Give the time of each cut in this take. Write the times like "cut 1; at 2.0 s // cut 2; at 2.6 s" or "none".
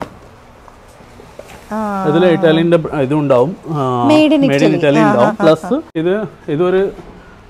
cut 1; at 5.9 s